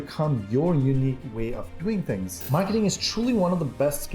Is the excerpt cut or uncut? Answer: cut